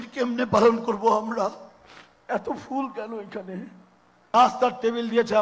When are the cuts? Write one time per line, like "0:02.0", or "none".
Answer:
0:04.2